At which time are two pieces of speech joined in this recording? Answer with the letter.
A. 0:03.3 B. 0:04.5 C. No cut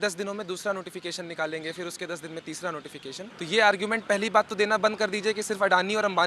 A